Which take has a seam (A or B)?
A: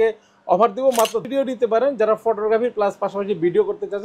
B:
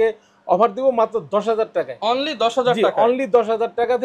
A